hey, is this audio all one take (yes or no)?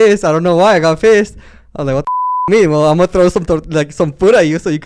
yes